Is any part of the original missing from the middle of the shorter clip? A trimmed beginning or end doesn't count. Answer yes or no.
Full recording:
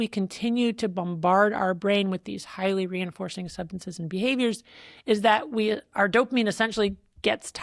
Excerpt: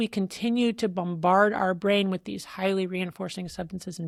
no